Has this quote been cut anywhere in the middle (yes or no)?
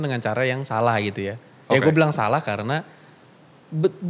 no